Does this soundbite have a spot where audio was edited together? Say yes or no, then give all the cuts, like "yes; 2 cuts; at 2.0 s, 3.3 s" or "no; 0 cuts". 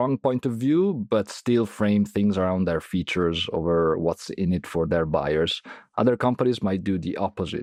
no; 0 cuts